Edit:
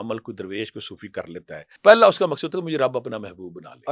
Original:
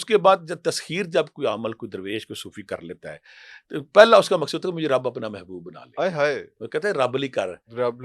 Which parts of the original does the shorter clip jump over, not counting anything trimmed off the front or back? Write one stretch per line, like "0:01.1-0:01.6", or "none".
0:03.3-0:03.9

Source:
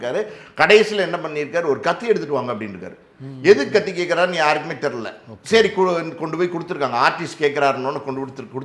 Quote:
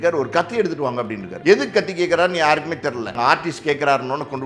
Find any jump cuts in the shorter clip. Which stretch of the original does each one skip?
0:02.8-0:03.2
0:05.1-0:06.9

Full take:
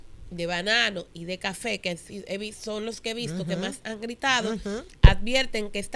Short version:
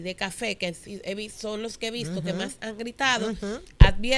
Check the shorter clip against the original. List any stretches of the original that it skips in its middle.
none

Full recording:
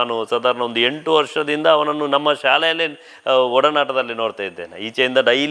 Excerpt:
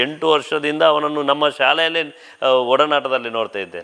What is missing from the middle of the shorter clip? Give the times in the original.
none

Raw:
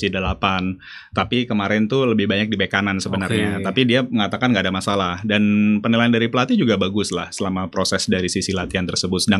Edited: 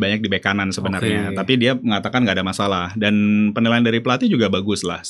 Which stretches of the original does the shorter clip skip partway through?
none

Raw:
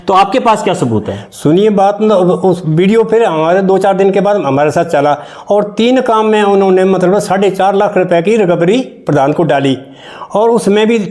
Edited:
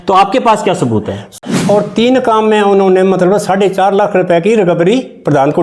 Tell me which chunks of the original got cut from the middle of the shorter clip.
0:01.4-0:05.2

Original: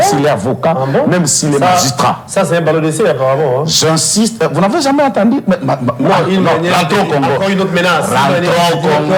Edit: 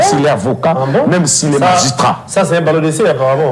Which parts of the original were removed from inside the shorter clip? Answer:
none

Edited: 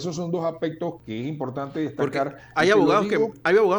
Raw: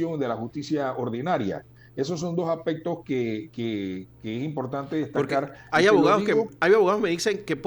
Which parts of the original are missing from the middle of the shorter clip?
0:03.0-0:04.1

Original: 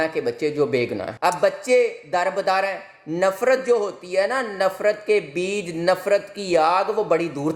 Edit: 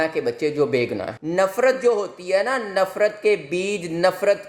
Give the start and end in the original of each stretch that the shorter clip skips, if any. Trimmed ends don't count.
0:01.1-0:02.9

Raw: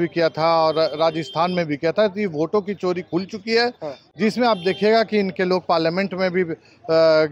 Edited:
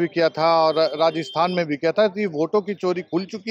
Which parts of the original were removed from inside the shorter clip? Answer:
none

